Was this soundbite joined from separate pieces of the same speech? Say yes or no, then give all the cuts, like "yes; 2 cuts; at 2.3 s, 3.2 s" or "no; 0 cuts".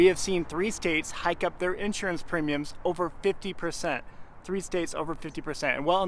no; 0 cuts